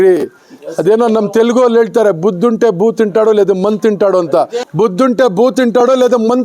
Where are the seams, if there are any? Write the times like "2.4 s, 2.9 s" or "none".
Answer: 4.6 s